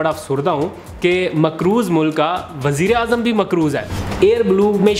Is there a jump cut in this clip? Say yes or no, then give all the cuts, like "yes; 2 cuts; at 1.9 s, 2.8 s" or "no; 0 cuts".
yes; 1 cut; at 4.0 s